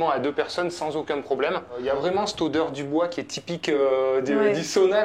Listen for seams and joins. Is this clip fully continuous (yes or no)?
no